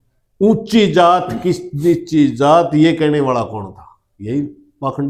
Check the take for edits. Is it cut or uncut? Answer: uncut